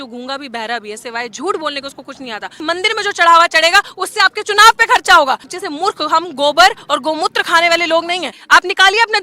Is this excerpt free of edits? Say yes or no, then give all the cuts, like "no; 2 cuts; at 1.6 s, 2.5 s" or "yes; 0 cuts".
no; 3 cuts; at 2.6 s, 5.5 s, 8.4 s